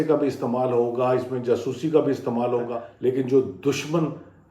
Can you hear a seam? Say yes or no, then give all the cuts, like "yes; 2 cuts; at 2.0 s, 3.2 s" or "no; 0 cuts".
yes; 1 cut; at 2.8 s